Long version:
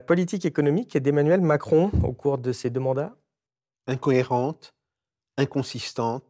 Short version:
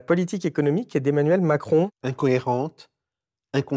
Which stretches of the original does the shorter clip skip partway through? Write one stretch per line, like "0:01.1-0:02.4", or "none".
0:01.9-0:03.8